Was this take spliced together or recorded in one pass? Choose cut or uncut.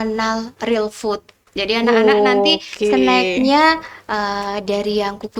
uncut